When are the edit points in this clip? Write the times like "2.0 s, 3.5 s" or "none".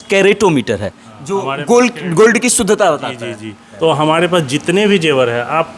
3.7 s